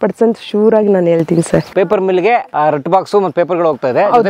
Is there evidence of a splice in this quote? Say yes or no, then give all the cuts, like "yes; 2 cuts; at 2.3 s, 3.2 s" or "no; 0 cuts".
yes; 2 cuts; at 1.7 s, 2.5 s